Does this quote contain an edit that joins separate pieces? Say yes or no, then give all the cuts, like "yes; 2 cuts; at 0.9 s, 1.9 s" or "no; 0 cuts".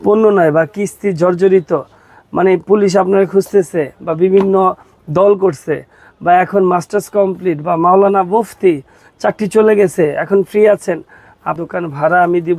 yes; 1 cut; at 11.6 s